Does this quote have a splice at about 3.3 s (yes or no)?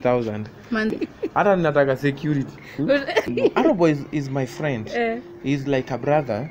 yes